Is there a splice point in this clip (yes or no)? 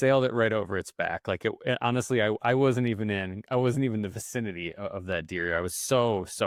no